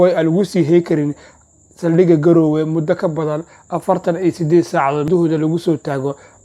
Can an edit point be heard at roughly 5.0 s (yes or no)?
yes